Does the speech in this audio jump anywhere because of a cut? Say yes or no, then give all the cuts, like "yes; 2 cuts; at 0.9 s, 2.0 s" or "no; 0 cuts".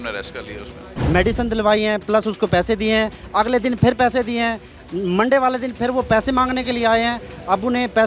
yes; 1 cut; at 0.9 s